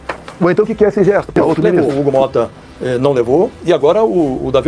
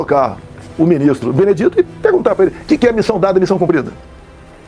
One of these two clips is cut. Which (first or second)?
first